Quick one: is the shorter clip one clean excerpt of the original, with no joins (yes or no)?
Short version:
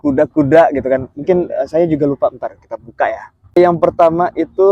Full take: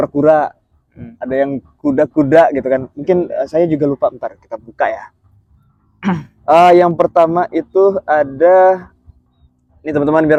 no